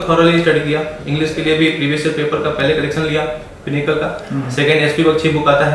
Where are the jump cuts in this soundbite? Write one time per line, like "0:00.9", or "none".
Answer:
none